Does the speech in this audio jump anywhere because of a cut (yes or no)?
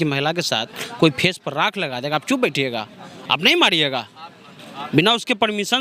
no